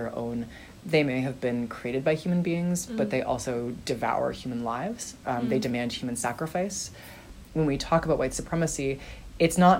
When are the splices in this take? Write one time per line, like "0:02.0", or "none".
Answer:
0:07.3